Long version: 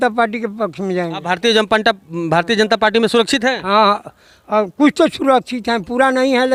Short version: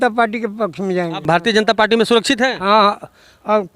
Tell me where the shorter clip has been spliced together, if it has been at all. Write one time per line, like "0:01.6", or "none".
0:01.2